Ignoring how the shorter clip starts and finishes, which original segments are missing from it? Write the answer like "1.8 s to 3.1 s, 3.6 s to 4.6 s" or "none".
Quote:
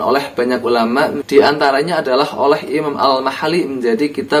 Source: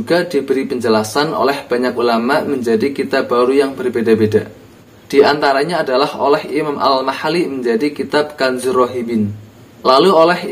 2.5 s to 5.0 s